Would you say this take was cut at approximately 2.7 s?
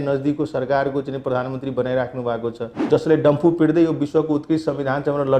yes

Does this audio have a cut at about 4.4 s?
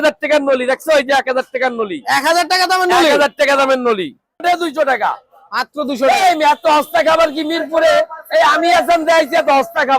yes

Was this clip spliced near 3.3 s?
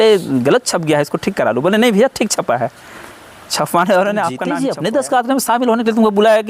no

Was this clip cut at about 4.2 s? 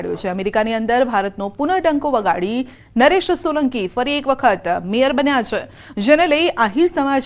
no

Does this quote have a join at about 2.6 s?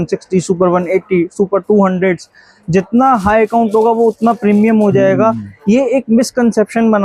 no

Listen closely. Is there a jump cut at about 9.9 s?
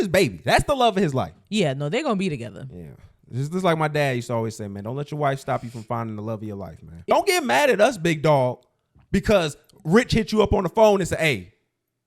no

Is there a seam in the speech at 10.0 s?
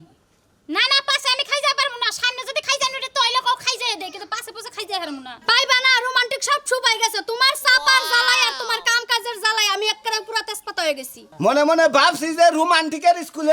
no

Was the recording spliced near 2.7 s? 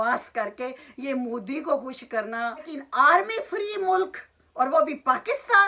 yes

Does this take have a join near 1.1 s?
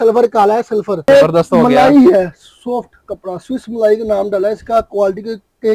yes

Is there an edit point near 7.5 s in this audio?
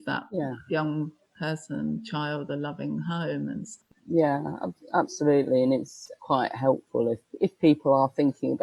no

